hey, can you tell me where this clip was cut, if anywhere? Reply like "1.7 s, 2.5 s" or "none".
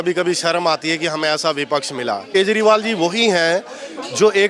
2.3 s